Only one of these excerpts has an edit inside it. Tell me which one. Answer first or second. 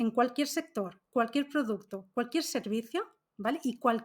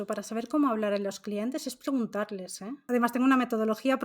second